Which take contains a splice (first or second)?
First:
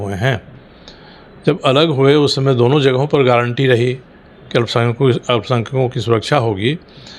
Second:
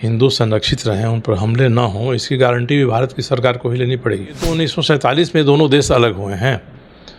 second